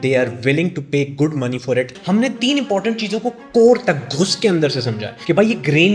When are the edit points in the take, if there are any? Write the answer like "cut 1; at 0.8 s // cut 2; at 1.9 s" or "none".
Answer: cut 1; at 1.9 s // cut 2; at 5.0 s